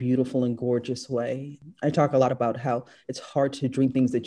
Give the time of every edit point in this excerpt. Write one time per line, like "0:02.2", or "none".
0:01.6